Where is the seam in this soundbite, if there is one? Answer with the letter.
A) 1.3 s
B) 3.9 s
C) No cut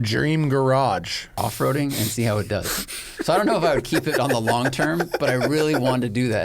A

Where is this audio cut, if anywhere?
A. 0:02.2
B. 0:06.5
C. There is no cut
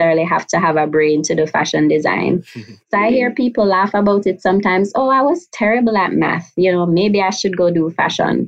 C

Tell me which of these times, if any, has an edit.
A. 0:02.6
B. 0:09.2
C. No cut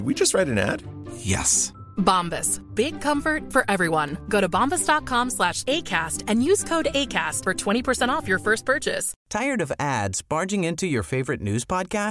B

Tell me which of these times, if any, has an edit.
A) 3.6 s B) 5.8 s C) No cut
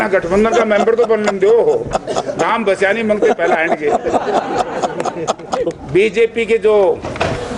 B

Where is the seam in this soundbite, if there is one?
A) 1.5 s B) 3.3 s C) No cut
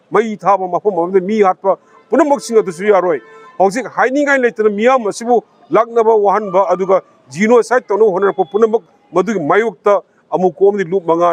C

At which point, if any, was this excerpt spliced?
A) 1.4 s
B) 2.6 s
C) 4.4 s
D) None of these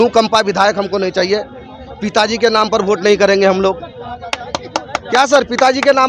D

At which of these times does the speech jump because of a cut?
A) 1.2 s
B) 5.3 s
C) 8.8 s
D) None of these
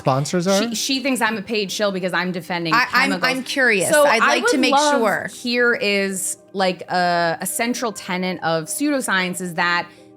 B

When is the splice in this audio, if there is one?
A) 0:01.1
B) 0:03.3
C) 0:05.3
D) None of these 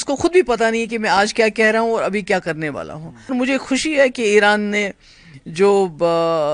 B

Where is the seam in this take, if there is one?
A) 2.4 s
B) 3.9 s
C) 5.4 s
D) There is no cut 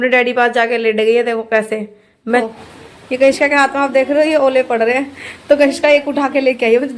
A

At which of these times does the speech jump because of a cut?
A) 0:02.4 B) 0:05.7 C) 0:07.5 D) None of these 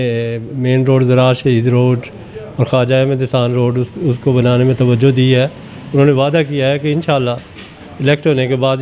D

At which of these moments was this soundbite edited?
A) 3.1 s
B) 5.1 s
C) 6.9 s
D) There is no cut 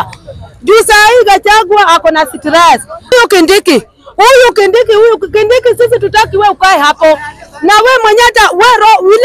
A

